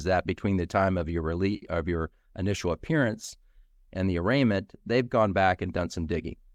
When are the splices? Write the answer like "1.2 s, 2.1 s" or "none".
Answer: none